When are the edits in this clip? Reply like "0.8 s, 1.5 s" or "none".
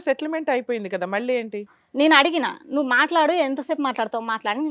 1.8 s